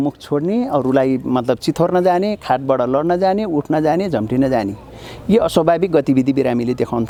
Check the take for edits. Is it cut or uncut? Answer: uncut